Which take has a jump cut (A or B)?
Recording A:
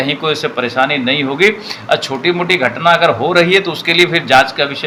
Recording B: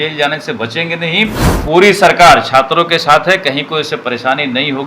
B